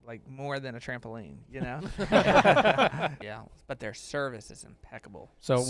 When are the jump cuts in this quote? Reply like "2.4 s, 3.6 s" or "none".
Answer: 3.2 s